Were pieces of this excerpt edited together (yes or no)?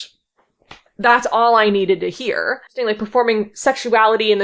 yes